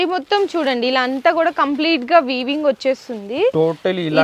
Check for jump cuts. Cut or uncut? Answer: uncut